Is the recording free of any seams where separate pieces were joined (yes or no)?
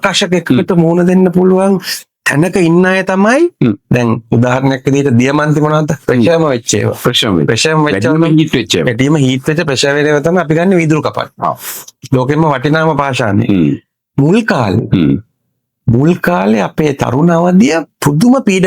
yes